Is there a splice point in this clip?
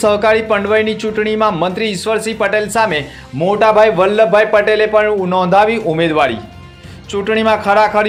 no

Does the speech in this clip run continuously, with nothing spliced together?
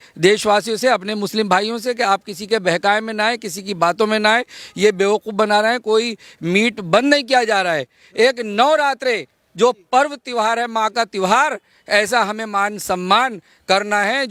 yes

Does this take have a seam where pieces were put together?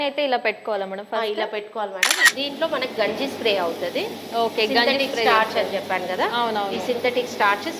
yes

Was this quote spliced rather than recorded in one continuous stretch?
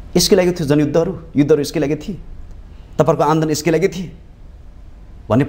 no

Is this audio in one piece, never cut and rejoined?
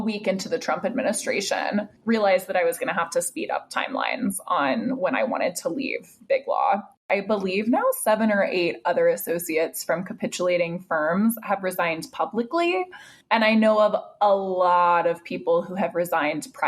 no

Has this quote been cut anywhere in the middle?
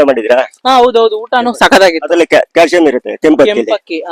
no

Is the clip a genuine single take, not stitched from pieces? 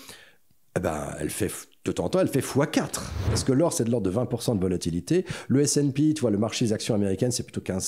no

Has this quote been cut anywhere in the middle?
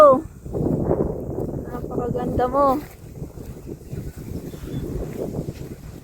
no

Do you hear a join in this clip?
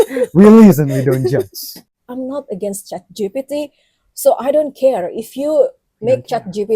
yes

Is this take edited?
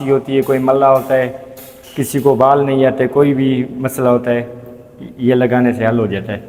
no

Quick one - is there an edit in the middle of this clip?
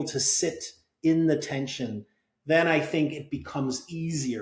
no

